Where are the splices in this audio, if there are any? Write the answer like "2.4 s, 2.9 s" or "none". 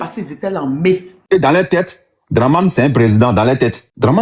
1.3 s